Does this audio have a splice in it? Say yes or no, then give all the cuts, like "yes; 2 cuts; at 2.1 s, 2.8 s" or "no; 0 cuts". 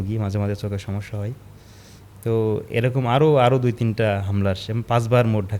no; 0 cuts